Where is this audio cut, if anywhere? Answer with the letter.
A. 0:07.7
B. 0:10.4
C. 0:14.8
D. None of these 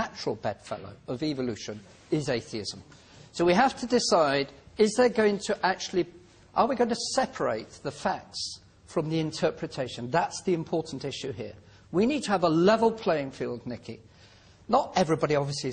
B